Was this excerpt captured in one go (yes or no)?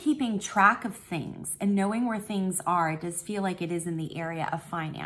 yes